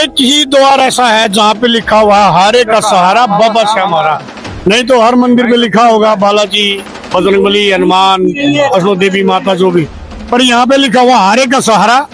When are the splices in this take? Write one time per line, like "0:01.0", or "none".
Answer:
none